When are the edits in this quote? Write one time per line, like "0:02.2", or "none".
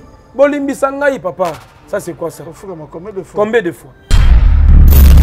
0:04.2